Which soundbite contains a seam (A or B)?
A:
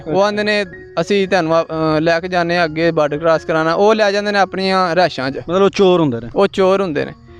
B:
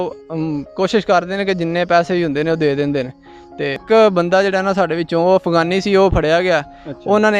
B